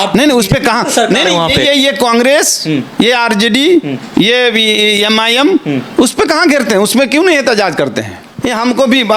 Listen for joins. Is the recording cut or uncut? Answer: cut